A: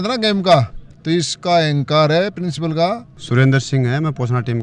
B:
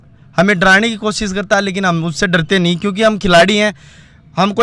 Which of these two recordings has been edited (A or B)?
A